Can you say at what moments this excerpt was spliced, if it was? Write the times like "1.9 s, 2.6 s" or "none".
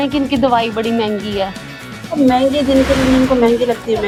none